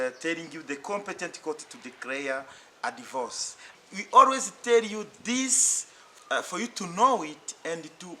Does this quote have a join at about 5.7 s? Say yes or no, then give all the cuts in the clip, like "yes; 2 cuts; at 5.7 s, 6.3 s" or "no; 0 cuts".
no; 1 cut; at 3.7 s